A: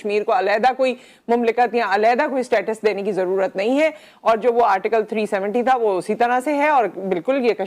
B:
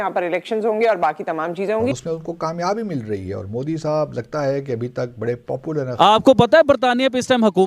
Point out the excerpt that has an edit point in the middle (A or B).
B